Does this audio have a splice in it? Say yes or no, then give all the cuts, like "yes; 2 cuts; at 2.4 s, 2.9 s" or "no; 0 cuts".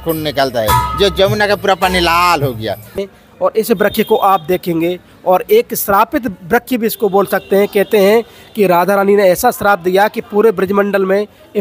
yes; 1 cut; at 3.0 s